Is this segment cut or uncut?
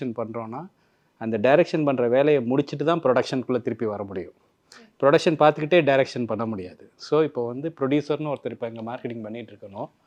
uncut